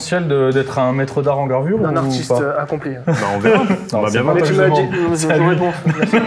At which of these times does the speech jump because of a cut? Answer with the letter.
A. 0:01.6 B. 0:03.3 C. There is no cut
C